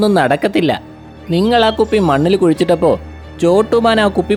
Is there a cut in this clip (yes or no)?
no